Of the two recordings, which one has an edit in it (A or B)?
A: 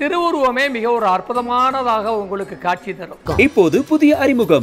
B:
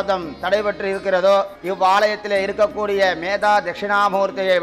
A